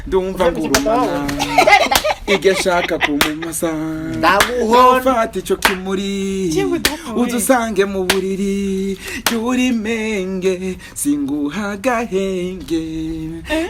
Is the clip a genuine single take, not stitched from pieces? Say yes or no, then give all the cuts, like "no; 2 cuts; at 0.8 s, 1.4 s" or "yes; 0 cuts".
yes; 0 cuts